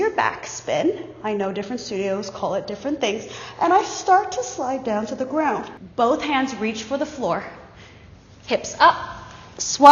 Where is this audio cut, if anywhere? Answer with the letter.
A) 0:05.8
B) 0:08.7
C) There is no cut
A